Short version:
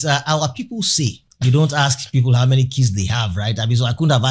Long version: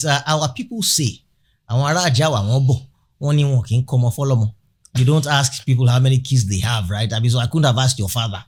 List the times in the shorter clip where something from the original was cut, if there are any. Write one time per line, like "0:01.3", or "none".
0:01.2